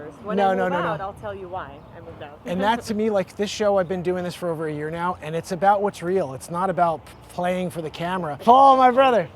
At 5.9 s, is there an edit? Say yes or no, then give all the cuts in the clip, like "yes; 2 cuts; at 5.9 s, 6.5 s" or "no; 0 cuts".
no; 1 cut; at 8.3 s